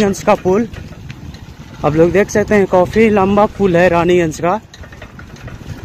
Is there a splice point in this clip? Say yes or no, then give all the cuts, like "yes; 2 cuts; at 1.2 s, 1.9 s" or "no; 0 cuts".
no; 0 cuts